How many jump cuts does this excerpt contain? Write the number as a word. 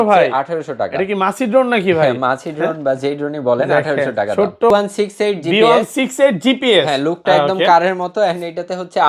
one